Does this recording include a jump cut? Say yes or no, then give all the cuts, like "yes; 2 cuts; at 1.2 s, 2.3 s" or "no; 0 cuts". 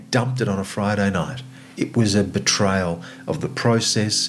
yes; 1 cut; at 1.7 s